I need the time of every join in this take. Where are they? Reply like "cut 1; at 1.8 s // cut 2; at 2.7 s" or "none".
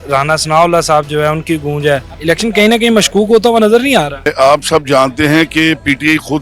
cut 1; at 2.1 s // cut 2; at 4.3 s